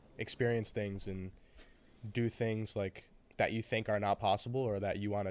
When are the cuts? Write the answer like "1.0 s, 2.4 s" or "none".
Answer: none